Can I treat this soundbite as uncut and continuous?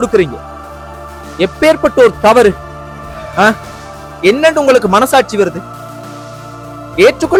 yes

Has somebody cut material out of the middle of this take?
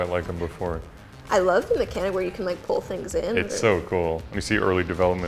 yes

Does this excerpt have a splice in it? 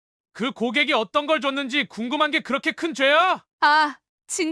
yes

